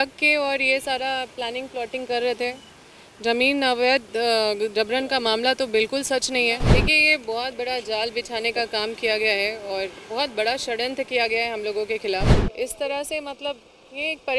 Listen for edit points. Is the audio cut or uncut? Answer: cut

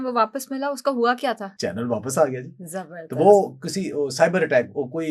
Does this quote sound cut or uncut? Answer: cut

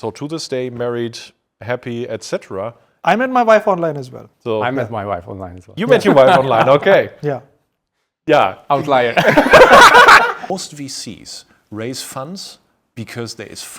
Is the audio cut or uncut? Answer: cut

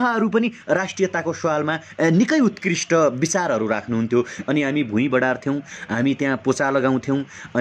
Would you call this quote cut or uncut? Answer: cut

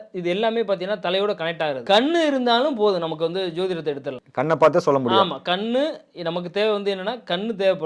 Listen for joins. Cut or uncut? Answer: cut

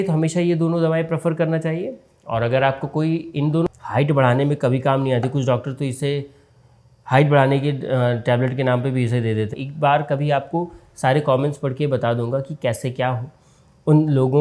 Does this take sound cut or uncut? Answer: cut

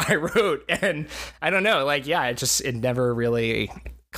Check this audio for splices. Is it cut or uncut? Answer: uncut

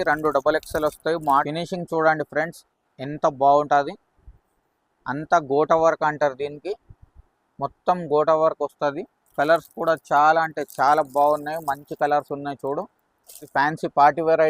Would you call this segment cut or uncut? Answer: cut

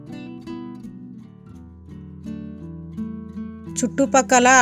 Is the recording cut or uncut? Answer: uncut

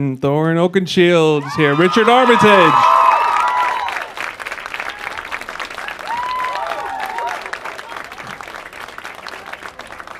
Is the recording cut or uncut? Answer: cut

